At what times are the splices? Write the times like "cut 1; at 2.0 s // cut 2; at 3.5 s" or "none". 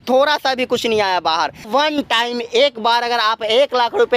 cut 1; at 1.7 s